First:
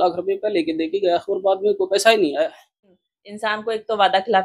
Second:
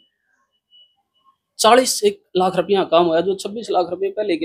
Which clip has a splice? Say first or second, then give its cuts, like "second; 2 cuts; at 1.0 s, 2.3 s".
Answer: first; 1 cut; at 2.9 s